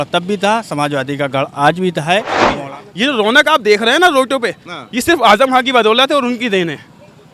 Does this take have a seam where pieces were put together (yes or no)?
yes